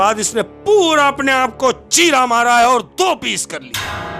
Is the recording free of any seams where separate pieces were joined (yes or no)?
yes